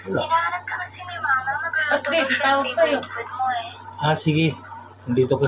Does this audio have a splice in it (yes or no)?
no